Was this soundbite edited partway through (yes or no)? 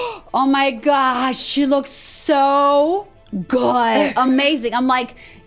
no